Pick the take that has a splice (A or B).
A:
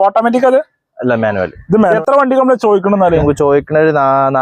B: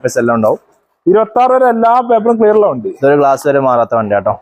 A